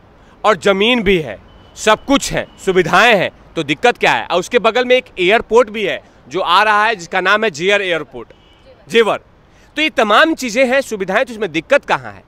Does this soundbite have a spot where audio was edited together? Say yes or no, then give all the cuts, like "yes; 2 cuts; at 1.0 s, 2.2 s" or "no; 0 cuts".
no; 0 cuts